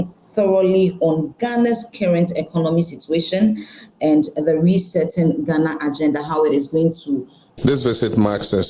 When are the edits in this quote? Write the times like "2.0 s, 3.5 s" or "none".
7.4 s